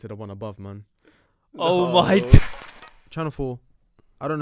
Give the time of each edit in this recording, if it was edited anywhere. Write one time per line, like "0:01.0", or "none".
0:02.4